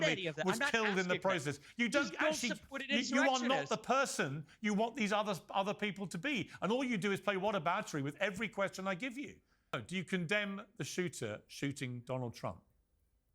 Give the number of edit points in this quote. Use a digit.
1